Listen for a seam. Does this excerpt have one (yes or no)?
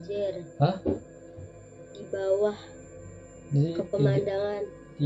no